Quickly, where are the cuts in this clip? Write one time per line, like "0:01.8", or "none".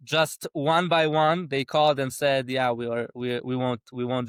none